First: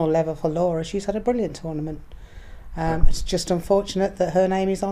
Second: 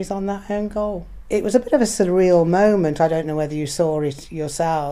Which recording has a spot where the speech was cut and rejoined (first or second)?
second